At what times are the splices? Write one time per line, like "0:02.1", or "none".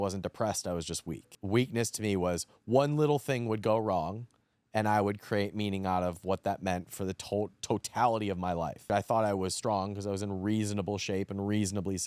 0:01.3
0:08.8